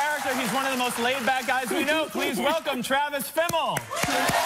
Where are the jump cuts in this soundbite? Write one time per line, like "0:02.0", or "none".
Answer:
none